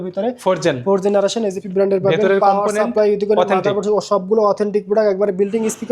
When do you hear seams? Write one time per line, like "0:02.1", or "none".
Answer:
0:01.6